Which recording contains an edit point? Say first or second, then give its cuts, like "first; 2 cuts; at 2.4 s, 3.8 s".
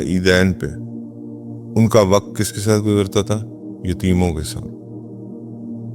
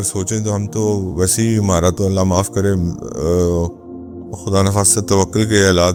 first; 1 cut; at 4.5 s